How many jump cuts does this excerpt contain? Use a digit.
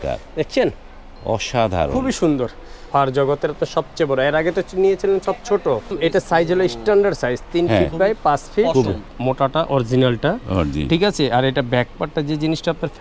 3